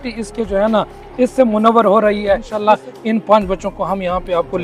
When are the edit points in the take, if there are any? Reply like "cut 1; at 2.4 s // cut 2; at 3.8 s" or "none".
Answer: cut 1; at 2.5 s